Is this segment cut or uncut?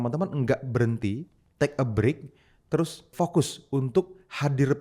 cut